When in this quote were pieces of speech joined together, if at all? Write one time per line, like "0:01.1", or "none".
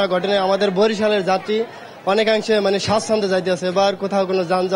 none